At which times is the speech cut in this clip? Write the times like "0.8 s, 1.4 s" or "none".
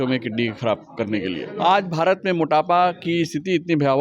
1.4 s